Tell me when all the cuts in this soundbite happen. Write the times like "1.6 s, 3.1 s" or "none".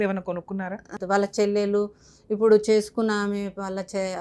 1.0 s

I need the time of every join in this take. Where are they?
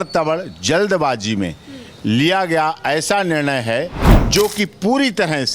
4.1 s

